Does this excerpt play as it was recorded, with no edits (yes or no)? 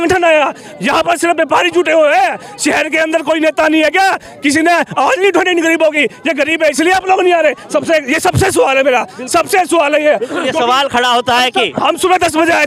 yes